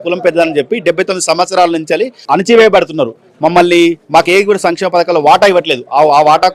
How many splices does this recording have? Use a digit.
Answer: 0